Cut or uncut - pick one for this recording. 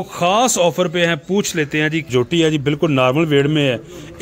cut